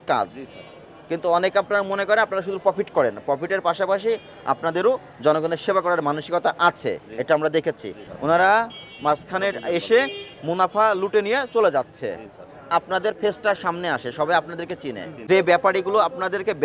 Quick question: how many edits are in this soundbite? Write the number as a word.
two